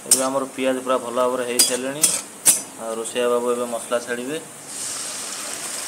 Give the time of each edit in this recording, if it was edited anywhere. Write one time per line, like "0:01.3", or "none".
none